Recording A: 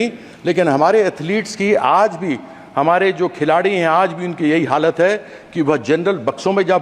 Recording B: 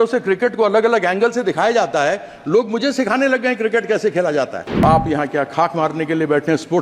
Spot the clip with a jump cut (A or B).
B